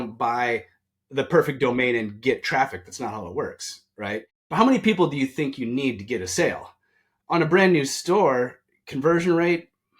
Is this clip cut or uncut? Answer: cut